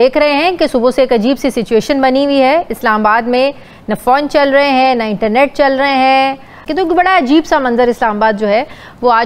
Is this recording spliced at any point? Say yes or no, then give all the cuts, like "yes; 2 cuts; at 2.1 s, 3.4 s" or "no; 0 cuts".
yes; 1 cut; at 6.6 s